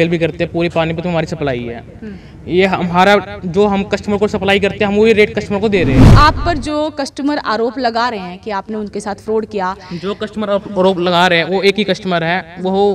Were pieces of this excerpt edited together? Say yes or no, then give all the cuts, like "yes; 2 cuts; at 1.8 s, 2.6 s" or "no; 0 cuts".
yes; 1 cut; at 6.1 s